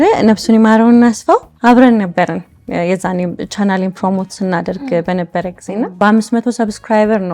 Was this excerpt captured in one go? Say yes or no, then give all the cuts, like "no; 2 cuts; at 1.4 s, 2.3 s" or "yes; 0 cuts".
no; 1 cut; at 5.9 s